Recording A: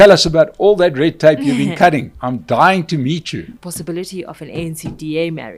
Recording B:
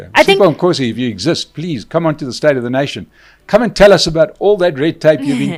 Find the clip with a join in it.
A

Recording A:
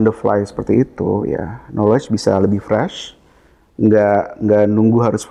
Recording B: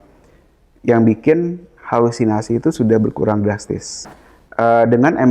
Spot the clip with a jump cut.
B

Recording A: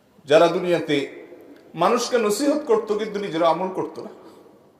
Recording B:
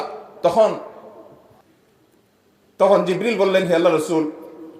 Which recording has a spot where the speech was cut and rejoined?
B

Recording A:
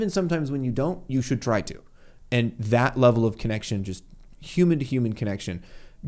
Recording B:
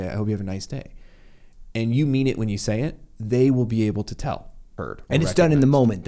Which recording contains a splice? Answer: B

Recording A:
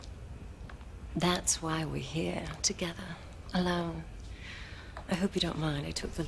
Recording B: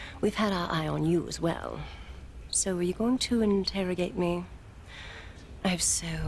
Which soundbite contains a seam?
A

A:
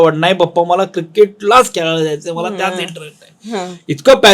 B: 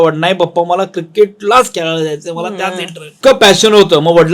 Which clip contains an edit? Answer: B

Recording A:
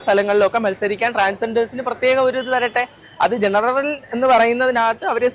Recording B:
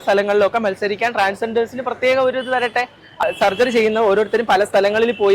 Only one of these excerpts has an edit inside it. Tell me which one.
B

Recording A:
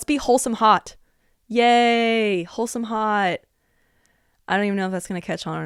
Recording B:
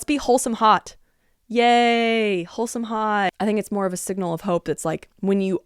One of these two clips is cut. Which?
B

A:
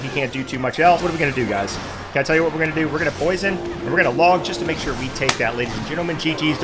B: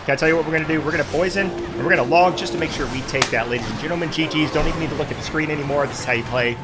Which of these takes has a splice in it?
A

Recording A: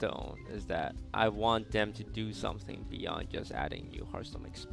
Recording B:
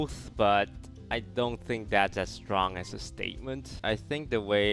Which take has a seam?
B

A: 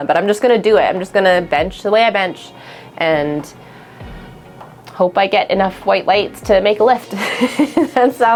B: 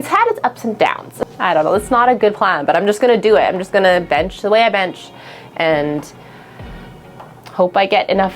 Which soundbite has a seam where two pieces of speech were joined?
B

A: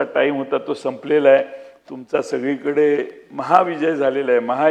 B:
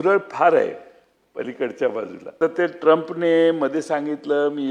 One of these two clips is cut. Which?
B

